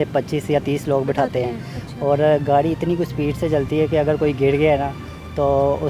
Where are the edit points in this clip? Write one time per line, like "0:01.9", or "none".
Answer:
none

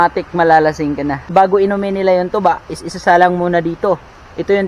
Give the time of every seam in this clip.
0:01.2

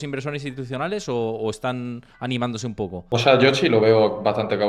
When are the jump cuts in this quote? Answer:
0:03.1

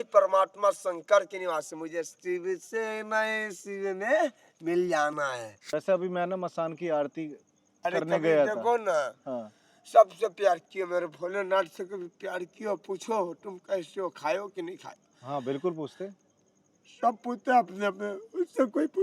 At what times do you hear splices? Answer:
0:05.5

